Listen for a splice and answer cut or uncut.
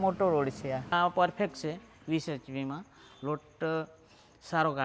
cut